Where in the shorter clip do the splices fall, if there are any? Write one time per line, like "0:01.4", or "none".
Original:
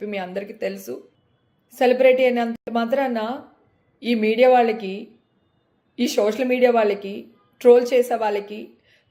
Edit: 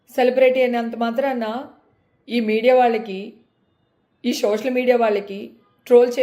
0:00.9